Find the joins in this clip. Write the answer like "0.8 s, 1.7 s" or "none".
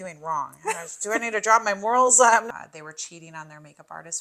2.5 s

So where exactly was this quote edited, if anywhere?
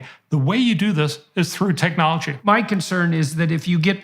2.5 s

